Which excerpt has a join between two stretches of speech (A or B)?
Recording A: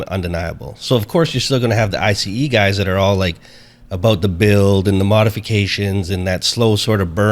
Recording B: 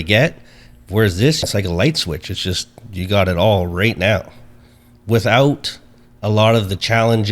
B